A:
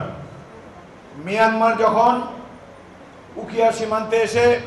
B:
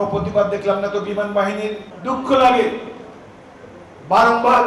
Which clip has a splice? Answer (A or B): B